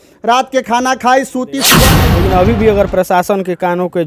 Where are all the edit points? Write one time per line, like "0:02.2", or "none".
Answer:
0:01.8